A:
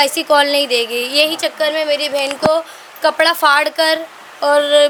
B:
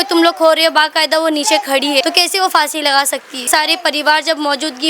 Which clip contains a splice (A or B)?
B